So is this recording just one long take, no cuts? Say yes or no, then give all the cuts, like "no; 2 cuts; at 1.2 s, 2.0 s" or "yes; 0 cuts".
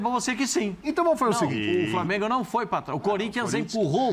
no; 1 cut; at 1.5 s